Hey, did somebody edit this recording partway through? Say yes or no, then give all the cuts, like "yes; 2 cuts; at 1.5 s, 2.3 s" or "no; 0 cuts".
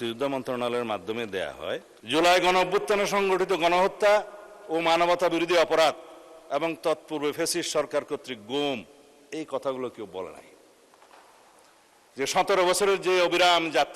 yes; 1 cut; at 1.9 s